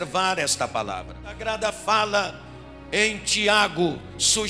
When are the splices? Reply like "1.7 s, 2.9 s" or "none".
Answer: 1.4 s